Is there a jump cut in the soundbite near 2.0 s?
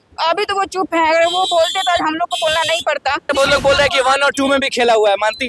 no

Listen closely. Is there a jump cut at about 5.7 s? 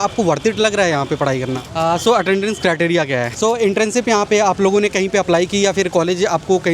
no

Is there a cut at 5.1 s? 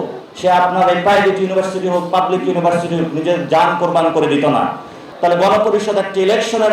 yes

